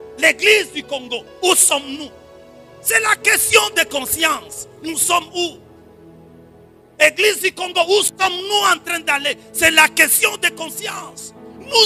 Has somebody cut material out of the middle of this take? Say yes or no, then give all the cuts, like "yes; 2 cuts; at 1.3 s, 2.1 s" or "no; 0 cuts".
no; 0 cuts